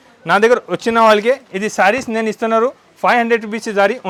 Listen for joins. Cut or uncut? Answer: uncut